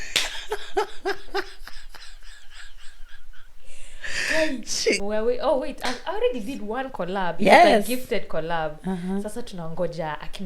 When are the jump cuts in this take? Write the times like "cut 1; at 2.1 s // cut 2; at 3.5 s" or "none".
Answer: cut 1; at 5.0 s